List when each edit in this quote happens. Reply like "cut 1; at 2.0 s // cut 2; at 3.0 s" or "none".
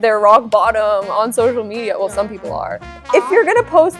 cut 1; at 2.9 s